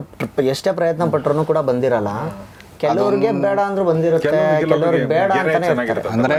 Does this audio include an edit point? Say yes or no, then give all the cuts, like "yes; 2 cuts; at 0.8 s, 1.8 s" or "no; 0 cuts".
no; 0 cuts